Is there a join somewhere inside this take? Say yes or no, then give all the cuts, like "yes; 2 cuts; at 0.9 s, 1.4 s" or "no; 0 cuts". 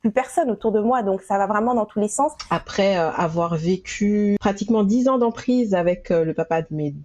yes; 2 cuts; at 2.4 s, 4.4 s